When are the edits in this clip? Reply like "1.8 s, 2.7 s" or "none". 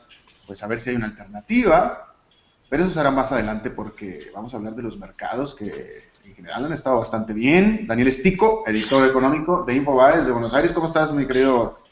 7.7 s